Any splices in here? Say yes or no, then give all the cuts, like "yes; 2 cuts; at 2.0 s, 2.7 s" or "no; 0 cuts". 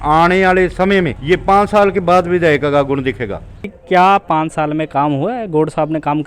yes; 2 cuts; at 1.2 s, 3.8 s